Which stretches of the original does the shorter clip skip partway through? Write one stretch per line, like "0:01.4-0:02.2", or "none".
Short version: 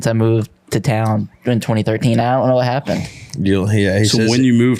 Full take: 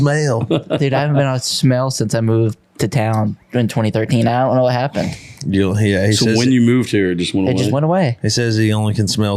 none